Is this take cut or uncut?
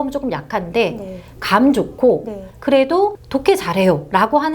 cut